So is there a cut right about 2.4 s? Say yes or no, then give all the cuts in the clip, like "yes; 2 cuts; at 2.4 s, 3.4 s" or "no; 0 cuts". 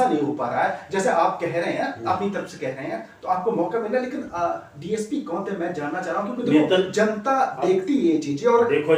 no; 0 cuts